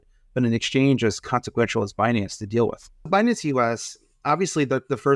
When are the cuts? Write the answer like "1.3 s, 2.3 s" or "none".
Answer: 3.1 s